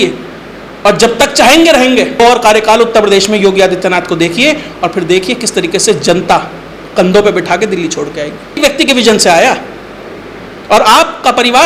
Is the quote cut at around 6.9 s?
no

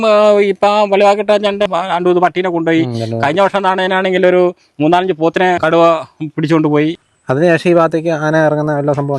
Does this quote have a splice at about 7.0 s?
yes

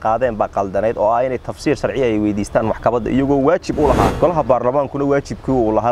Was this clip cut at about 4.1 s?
yes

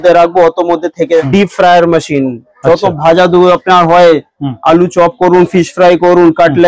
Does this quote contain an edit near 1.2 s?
yes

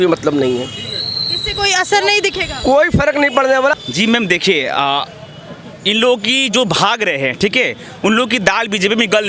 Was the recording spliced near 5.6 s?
no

